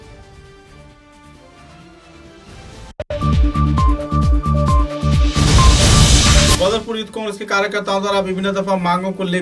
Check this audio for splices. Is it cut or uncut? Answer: cut